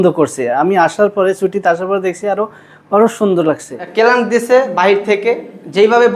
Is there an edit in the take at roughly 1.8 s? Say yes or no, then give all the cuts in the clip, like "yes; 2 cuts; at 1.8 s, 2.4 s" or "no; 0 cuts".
no; 1 cut; at 3.8 s